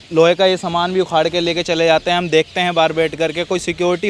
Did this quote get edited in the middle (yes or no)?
no